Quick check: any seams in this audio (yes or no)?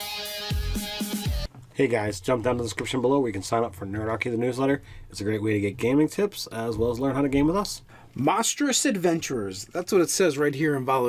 yes